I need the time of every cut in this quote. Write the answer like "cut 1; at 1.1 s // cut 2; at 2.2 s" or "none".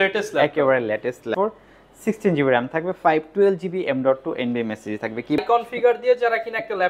cut 1; at 1.3 s // cut 2; at 5.4 s